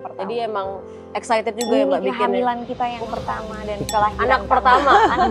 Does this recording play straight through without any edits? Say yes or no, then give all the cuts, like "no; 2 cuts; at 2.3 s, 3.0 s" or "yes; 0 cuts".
yes; 0 cuts